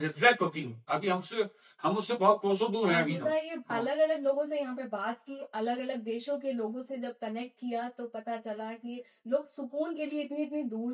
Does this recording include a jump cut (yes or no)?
yes